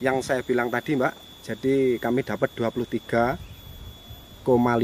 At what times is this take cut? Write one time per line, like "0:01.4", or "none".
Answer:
none